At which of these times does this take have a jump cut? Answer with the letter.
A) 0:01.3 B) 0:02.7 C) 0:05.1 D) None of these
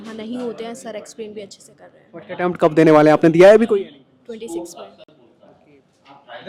D